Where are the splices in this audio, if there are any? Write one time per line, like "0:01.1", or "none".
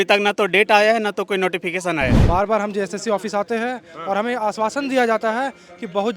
0:02.2